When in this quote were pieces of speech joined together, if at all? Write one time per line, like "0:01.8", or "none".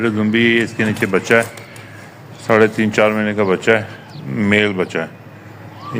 none